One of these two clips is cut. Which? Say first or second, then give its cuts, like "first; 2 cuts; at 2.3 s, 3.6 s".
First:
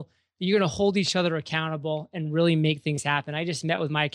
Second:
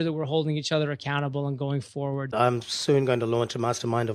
second; 1 cut; at 2.3 s